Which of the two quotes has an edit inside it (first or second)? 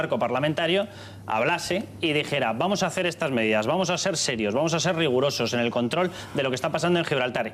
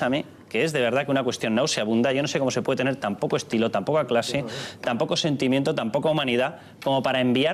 second